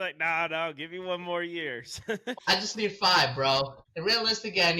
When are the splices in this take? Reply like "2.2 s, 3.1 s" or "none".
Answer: 2.3 s, 3.8 s